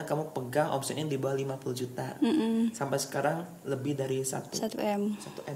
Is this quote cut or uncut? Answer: uncut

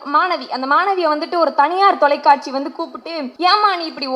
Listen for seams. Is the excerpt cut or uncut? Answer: cut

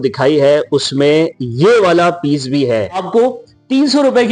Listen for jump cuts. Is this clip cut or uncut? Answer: cut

